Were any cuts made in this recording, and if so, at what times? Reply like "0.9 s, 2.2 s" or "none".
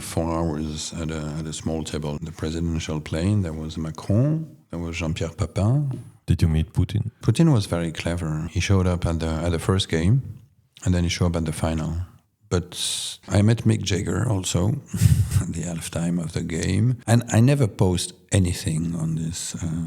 6.1 s, 13.2 s, 17.0 s